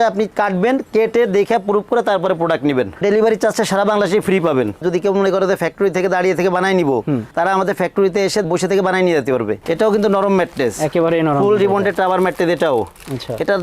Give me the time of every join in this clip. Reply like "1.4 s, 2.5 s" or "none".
4.8 s, 9.6 s